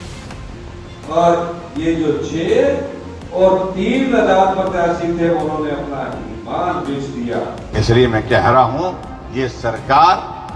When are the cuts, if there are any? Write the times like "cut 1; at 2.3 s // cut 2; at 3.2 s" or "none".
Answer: cut 1; at 7.6 s